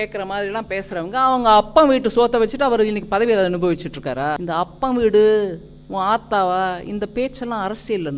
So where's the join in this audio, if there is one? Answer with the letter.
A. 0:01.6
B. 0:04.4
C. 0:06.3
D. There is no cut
B